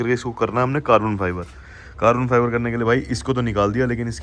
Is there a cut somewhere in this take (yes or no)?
no